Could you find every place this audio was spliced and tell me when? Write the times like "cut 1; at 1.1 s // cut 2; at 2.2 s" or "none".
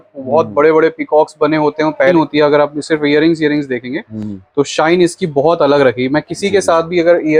cut 1; at 2.1 s